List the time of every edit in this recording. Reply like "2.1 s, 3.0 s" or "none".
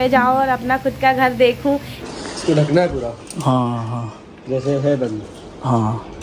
2.0 s